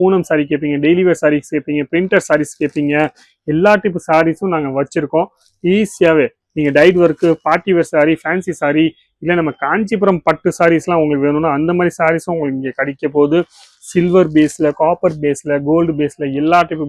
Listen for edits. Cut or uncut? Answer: uncut